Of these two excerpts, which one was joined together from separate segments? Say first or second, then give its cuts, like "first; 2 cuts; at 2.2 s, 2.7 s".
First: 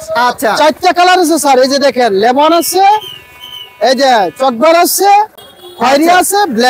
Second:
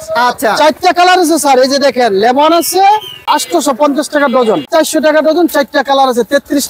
second; 2 cuts; at 3.2 s, 4.7 s